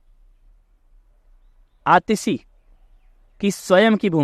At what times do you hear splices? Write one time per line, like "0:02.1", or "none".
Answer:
none